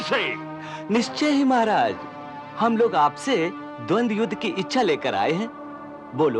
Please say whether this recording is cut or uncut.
uncut